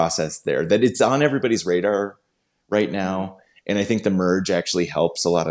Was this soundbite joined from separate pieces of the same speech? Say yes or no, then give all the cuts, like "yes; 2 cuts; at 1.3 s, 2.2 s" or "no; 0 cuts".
yes; 1 cut; at 0.9 s